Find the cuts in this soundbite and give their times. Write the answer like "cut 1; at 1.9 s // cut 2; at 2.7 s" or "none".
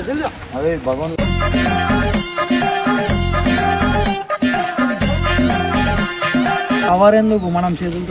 none